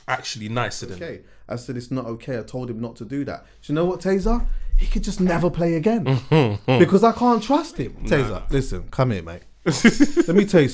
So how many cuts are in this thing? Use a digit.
2